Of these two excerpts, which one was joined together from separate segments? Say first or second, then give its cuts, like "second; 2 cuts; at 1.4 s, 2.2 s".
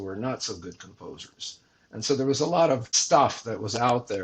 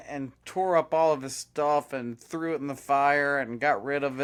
first; 1 cut; at 2.9 s